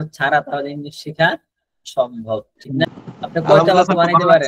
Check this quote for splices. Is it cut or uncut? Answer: cut